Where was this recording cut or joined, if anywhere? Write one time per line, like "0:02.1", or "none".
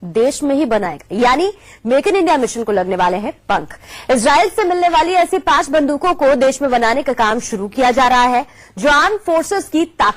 none